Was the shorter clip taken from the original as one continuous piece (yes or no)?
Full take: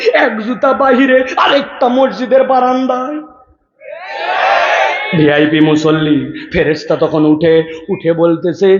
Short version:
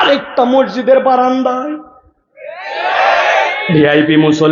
yes